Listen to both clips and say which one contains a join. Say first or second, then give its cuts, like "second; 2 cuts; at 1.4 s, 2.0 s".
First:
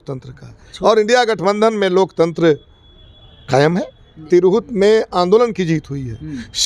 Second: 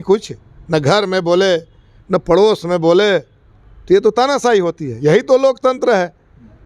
first; 1 cut; at 4.2 s